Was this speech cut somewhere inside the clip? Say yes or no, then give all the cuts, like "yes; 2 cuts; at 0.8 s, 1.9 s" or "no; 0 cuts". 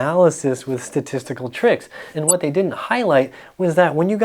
yes; 1 cut; at 2.1 s